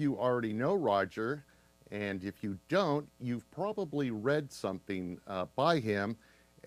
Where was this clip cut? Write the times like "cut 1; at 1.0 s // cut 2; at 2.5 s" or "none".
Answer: none